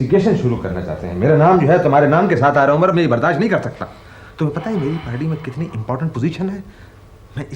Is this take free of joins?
yes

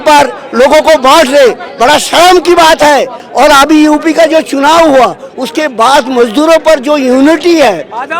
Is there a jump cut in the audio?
yes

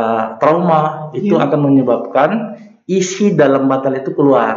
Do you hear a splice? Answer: no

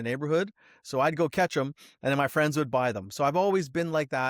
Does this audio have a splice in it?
no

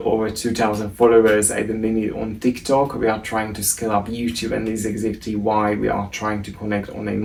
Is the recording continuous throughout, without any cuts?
yes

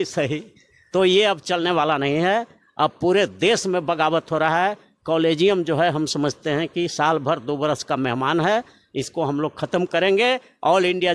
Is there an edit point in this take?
no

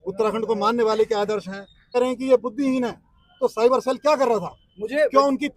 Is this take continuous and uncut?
no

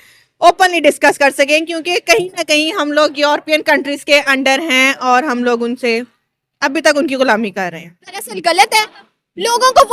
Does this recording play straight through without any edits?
no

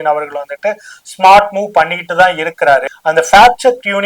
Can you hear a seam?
yes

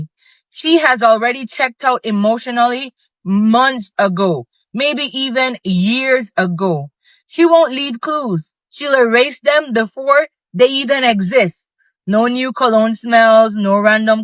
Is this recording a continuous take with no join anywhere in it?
yes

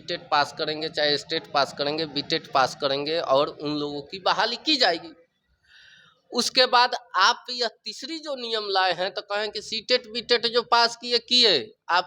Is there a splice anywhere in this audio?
no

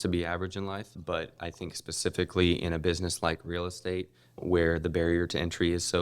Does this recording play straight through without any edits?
no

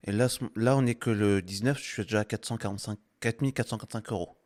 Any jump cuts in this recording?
no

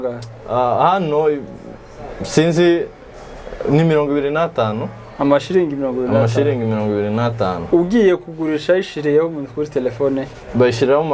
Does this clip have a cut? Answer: no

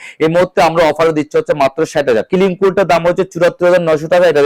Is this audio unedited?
no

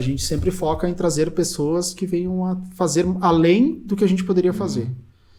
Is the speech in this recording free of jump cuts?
yes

